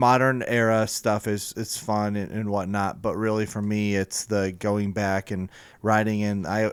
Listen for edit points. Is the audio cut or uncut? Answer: uncut